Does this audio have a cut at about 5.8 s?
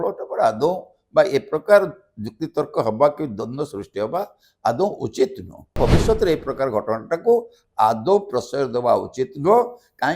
yes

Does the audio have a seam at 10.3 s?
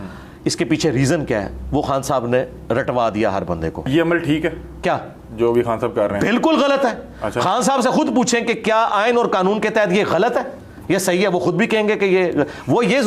no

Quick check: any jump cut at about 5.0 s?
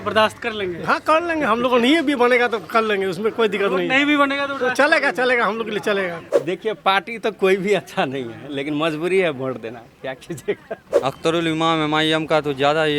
no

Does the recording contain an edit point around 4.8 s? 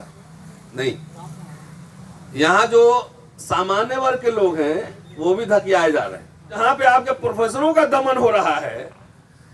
no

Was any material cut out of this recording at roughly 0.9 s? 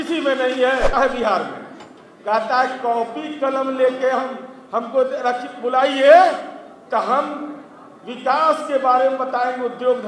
yes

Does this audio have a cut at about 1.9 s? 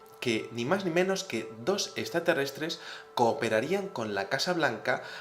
yes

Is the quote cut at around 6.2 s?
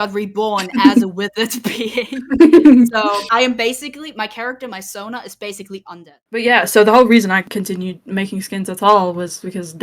yes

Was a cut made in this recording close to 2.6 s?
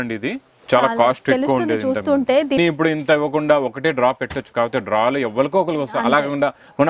yes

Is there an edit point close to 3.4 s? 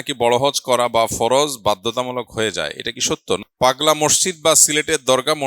yes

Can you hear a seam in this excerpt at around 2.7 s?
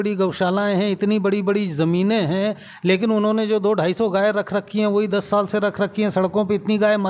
no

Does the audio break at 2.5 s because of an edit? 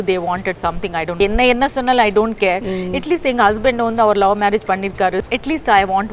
no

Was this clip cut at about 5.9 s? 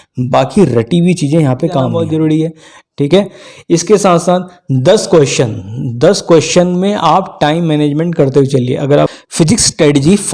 no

